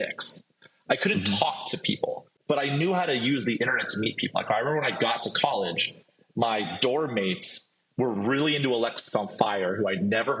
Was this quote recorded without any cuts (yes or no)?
yes